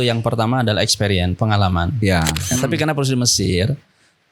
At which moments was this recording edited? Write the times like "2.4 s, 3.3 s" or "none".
2.5 s